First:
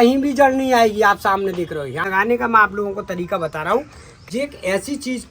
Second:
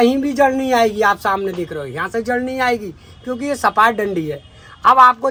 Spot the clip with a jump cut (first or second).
first